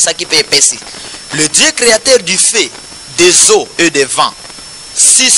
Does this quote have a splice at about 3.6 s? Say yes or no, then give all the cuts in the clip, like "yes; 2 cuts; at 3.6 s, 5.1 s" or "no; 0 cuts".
no; 0 cuts